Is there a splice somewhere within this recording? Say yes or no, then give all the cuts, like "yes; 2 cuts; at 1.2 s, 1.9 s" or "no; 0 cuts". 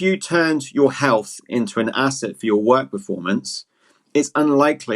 no; 0 cuts